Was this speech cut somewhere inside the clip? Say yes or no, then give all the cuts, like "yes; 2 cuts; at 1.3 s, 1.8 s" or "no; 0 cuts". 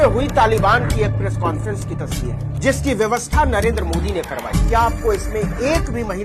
no; 0 cuts